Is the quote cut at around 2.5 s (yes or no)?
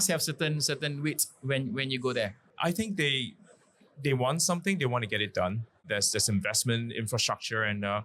yes